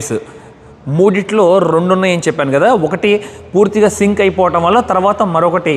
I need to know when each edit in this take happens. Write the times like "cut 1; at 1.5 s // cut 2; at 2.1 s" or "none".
none